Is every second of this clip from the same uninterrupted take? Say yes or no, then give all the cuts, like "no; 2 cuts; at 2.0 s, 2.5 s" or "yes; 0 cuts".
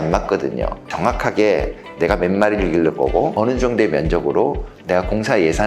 no; 2 cuts; at 0.9 s, 3.4 s